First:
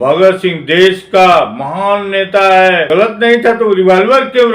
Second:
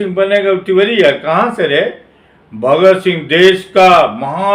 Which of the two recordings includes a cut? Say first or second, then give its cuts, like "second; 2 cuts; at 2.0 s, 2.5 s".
first; 1 cut; at 2.9 s